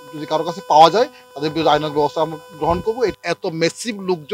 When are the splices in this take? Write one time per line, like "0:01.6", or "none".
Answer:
0:03.2